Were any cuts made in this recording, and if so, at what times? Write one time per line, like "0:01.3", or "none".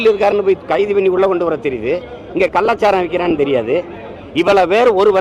none